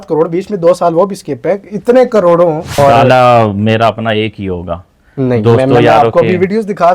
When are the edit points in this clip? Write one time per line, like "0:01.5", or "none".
0:02.7